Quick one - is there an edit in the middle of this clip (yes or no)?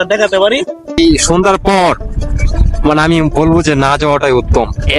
yes